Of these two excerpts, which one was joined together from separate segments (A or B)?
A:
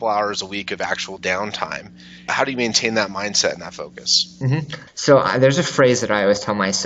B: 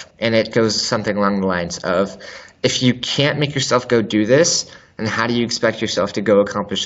A